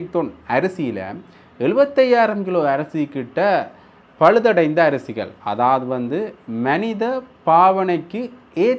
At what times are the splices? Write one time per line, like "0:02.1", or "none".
none